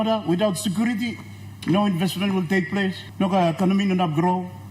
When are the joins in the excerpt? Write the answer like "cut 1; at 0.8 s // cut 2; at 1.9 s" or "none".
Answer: cut 1; at 3.0 s